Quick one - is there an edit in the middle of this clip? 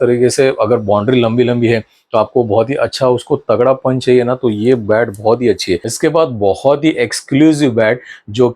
yes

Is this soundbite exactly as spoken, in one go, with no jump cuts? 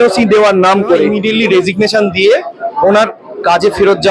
no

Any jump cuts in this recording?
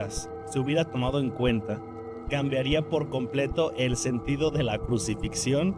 no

